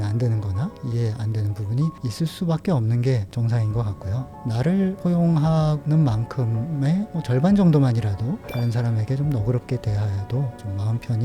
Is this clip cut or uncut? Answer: uncut